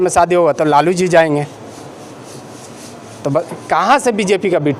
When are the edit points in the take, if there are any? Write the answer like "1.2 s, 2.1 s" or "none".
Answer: none